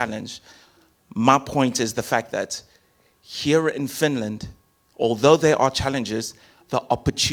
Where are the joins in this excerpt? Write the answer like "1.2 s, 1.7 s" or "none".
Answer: none